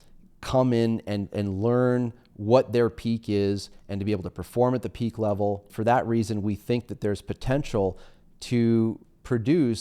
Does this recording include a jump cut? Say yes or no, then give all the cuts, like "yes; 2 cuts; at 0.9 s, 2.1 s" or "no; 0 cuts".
yes; 1 cut; at 5.7 s